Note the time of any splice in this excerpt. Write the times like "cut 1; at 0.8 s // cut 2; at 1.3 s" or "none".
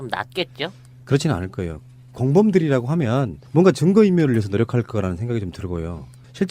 cut 1; at 4.5 s

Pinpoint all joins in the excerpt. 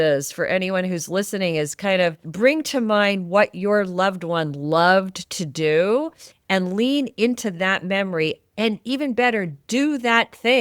cut 1; at 2.2 s

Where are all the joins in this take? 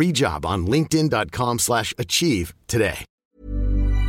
cut 1; at 3.2 s

